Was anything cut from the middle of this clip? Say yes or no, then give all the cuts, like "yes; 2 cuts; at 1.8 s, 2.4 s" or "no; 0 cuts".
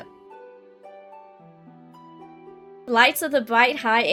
no; 0 cuts